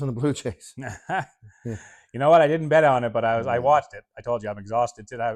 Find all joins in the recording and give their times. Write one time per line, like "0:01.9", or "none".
none